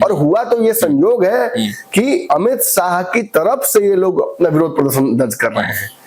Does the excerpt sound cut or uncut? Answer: uncut